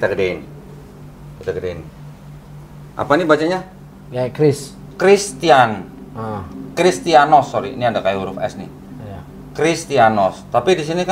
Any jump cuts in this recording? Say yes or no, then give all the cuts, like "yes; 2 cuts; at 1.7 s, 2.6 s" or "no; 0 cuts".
no; 0 cuts